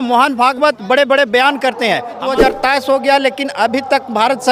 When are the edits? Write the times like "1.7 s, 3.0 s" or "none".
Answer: 2.2 s